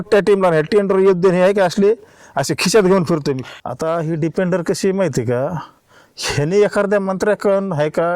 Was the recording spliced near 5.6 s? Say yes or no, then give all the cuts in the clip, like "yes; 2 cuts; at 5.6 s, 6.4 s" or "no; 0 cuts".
no; 1 cut; at 3.5 s